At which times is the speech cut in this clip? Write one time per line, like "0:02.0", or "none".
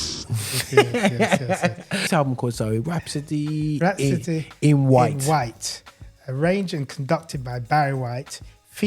0:02.0

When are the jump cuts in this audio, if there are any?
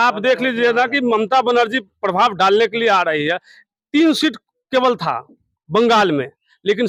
none

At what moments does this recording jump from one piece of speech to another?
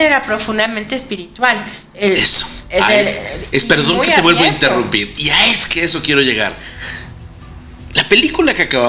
none

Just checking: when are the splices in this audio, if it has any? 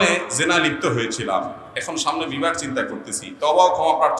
none

